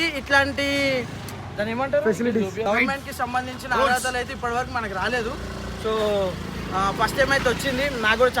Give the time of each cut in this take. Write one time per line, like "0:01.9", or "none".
0:02.6